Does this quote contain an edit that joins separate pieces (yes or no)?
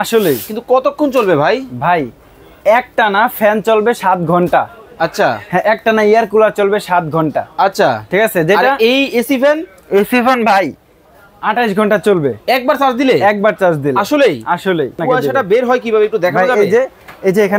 yes